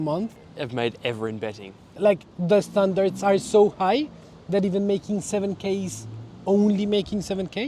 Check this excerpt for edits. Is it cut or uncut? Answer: cut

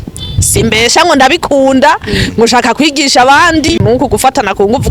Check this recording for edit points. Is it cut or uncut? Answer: cut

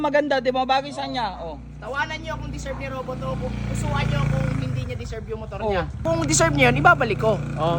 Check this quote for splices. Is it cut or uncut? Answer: uncut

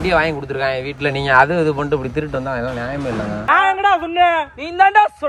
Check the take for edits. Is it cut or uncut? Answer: cut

